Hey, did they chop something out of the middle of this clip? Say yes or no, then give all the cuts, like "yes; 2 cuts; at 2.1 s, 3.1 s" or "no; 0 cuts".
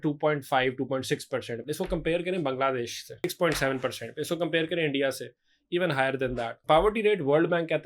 yes; 3 cuts; at 1.5 s, 3.2 s, 6.5 s